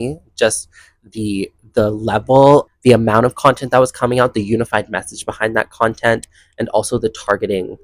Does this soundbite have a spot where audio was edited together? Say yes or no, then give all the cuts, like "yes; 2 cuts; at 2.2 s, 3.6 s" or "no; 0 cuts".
yes; 1 cut; at 2.7 s